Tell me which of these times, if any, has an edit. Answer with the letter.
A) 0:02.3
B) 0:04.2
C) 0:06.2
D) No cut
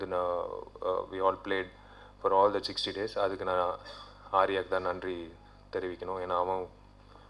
D